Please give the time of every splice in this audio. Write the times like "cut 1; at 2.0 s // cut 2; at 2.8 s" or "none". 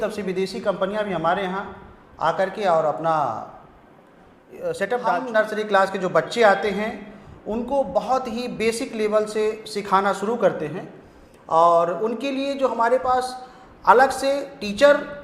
cut 1; at 5.2 s